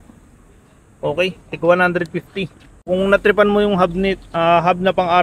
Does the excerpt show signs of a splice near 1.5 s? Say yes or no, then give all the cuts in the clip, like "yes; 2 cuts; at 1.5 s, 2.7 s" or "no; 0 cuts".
no; 1 cut; at 2.8 s